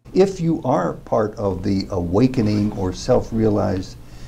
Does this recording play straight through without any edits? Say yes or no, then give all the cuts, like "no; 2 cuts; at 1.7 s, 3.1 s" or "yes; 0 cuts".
yes; 0 cuts